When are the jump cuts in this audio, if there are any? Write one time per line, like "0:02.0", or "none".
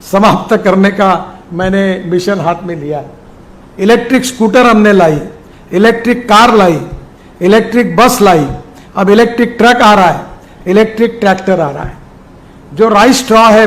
none